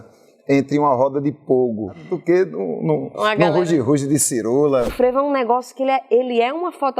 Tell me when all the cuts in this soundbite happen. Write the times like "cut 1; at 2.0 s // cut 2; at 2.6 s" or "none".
cut 1; at 2.1 s // cut 2; at 4.9 s